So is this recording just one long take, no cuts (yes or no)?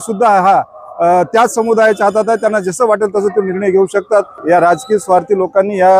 no